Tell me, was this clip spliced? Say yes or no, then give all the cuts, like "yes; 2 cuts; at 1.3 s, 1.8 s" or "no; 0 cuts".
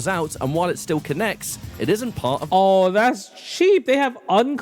no; 0 cuts